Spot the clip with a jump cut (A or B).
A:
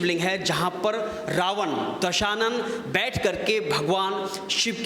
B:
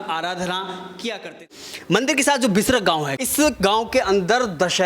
B